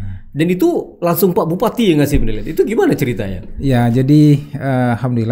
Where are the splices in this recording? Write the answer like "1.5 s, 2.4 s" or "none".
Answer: none